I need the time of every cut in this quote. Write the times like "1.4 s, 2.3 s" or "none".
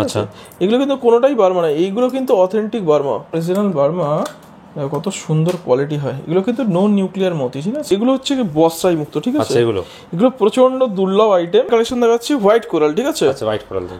3.3 s, 7.9 s, 11.7 s